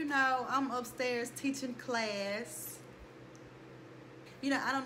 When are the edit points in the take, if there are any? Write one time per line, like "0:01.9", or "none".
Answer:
none

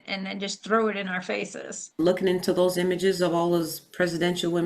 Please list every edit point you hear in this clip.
0:02.0

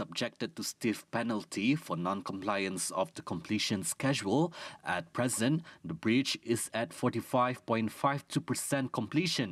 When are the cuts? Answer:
none

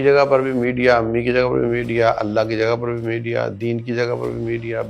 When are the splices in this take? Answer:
none

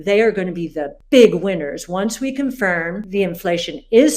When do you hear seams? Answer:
0:03.0

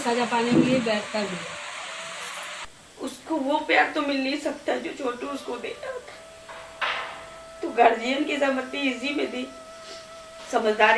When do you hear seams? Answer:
0:02.7

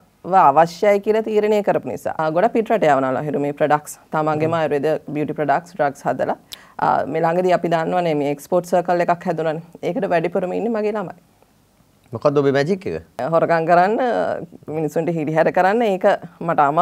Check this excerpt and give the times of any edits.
0:02.2
0:06.5
0:13.2

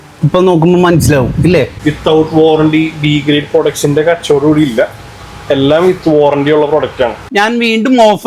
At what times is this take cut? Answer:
0:01.7
0:07.2

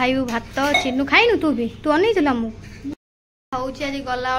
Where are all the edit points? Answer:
0:02.9

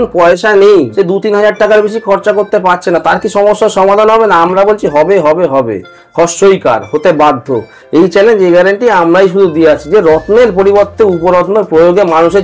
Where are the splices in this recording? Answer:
0:00.9

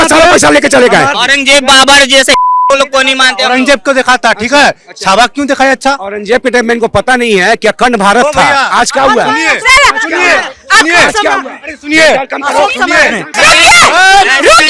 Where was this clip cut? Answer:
0:01.1
0:13.4

